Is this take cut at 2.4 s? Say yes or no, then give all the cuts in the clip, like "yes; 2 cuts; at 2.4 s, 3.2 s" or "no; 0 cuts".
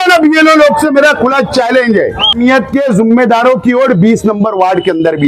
yes; 1 cut; at 2.4 s